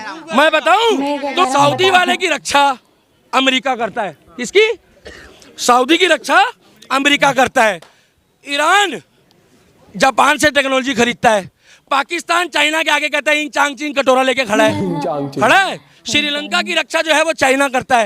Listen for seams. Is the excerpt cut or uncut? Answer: cut